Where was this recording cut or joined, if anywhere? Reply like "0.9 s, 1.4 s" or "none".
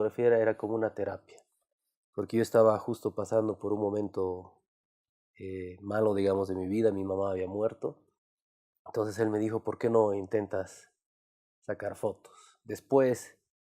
3.4 s